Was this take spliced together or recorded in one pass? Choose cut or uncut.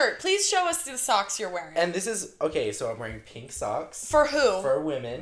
uncut